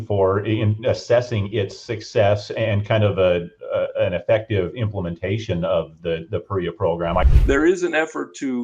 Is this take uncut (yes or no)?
no